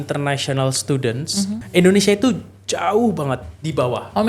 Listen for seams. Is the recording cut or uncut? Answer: cut